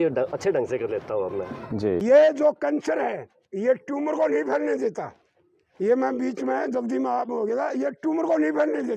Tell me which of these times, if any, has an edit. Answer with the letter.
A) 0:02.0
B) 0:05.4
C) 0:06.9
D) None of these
A